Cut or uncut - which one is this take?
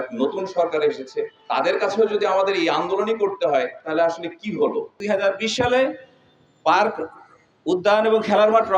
cut